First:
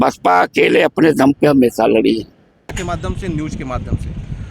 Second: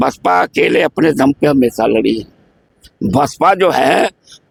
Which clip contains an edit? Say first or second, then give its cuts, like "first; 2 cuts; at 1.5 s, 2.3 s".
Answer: first; 1 cut; at 2.8 s